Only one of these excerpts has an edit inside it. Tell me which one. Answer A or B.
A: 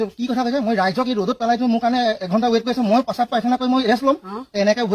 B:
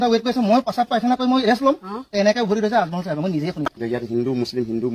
B